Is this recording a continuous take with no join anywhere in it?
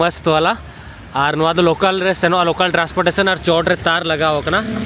yes; 0 cuts

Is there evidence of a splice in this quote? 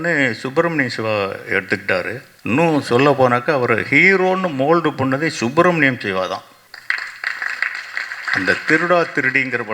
yes; 2 cuts; at 2.2 s, 6.6 s

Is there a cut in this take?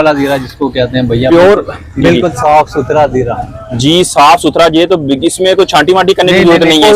no; 0 cuts

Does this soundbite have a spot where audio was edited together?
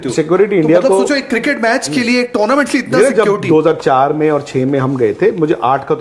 no; 0 cuts

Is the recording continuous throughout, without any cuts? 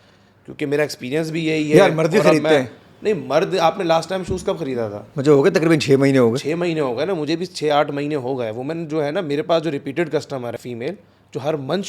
no; 1 cut; at 10.5 s

